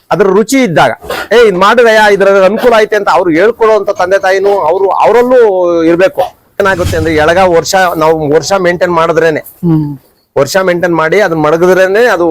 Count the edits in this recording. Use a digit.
1